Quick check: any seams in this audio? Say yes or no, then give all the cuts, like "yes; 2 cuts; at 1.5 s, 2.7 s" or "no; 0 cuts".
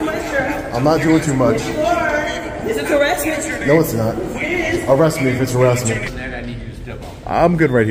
yes; 1 cut; at 6.2 s